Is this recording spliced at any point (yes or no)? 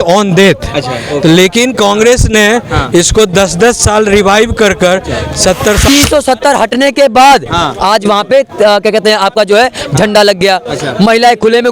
yes